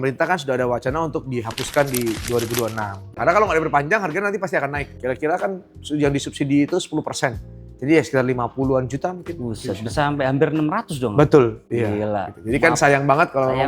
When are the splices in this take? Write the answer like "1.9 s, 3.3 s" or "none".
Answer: 3.2 s, 5.0 s